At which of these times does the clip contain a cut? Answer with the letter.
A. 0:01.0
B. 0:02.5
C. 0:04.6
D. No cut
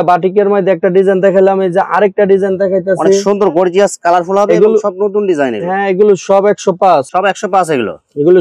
D